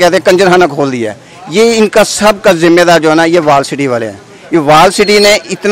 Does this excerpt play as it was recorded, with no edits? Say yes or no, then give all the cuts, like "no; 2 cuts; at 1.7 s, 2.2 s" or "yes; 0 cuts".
yes; 0 cuts